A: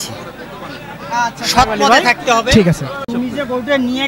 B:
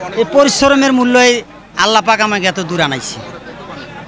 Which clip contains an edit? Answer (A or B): A